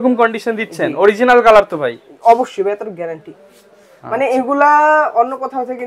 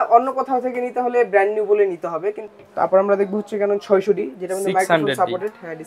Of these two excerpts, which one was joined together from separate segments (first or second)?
second